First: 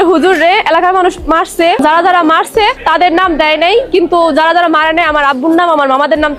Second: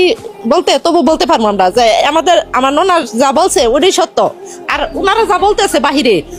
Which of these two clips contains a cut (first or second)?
first